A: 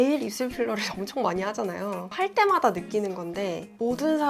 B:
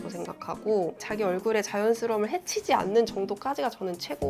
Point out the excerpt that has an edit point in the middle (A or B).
A